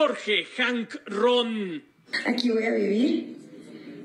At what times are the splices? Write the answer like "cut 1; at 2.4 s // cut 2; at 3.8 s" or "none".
cut 1; at 2.1 s